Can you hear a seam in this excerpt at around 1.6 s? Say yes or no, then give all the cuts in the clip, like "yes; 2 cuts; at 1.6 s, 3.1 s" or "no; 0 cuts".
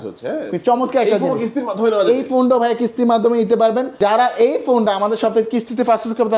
no; 1 cut; at 3.9 s